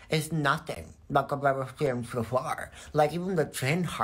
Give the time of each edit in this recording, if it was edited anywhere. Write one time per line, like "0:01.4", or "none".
none